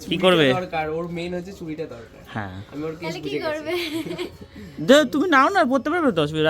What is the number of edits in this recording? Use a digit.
0